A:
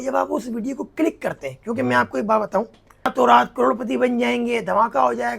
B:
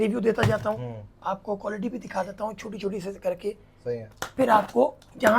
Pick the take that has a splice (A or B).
A